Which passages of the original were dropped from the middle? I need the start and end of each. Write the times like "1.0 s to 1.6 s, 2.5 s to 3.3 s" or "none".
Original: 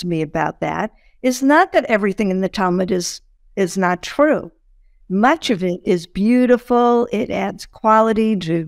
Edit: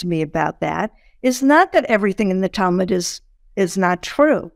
none